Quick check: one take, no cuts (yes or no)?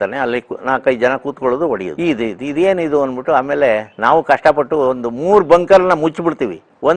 yes